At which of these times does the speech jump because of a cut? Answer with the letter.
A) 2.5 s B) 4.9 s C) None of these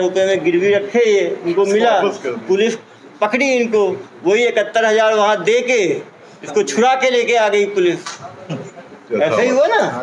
C